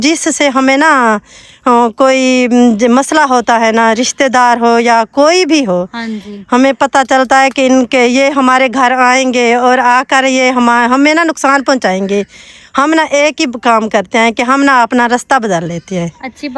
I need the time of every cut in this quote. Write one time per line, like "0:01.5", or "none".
none